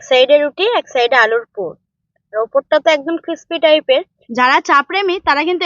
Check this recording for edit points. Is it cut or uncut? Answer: cut